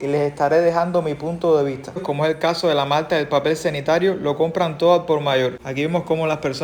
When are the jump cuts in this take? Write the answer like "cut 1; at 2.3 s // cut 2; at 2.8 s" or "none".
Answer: cut 1; at 2.0 s // cut 2; at 5.6 s